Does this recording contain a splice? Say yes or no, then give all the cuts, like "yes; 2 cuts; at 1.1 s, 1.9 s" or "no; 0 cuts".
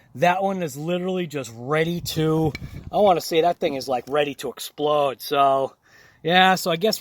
yes; 1 cut; at 5.8 s